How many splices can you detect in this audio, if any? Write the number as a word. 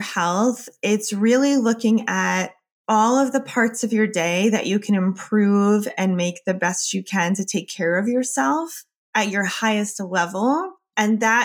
zero